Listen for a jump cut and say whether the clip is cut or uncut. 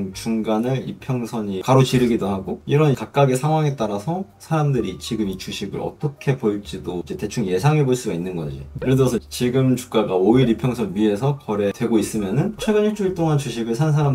uncut